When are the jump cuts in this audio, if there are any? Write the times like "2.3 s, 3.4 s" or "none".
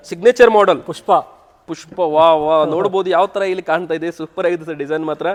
none